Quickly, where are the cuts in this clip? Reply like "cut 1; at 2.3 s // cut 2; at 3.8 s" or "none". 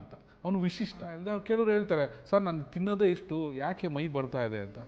cut 1; at 1.2 s